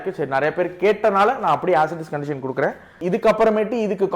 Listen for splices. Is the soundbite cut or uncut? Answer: cut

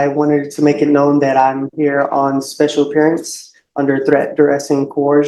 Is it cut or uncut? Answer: uncut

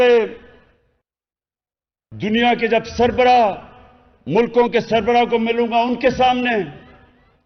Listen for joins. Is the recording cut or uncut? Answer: uncut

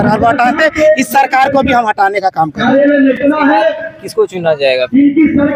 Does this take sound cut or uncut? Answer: uncut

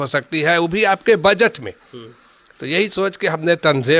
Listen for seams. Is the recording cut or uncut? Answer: uncut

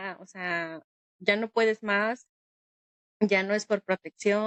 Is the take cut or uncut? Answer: uncut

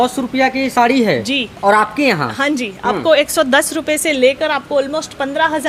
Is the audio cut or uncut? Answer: uncut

